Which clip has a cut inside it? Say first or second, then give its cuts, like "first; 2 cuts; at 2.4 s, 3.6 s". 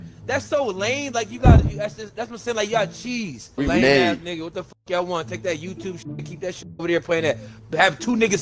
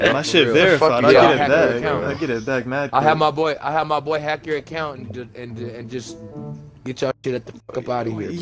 first; 1 cut; at 3.6 s